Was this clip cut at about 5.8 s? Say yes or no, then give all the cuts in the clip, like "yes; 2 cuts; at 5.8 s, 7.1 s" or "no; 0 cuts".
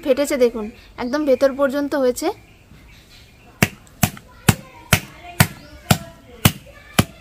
no; 0 cuts